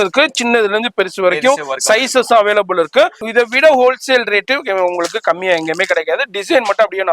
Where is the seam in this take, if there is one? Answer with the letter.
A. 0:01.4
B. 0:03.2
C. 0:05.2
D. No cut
B